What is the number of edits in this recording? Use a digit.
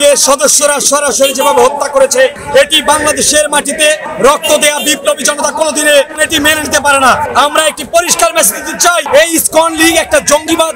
0